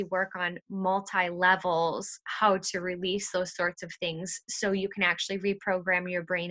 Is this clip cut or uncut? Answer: uncut